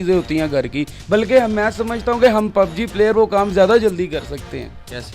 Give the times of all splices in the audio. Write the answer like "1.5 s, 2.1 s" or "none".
none